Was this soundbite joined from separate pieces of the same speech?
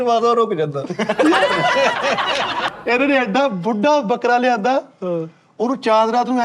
yes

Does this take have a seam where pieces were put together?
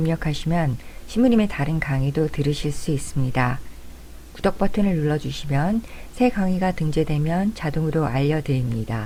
no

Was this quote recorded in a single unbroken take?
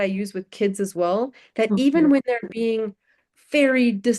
yes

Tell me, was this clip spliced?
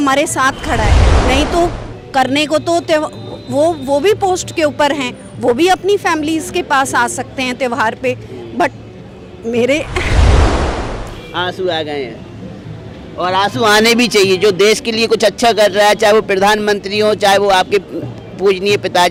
no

